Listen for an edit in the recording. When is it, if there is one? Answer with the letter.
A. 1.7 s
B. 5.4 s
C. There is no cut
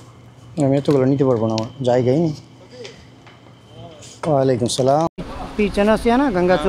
B